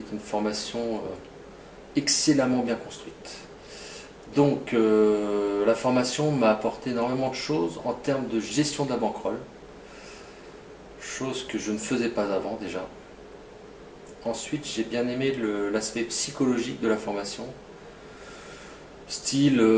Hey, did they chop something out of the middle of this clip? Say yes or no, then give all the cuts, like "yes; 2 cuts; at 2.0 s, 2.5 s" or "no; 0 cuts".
no; 0 cuts